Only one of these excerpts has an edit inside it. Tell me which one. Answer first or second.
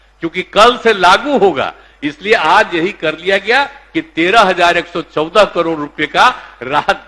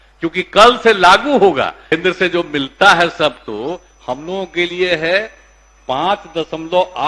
second